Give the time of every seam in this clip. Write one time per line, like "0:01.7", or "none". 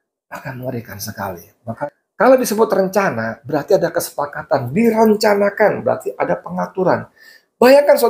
0:01.7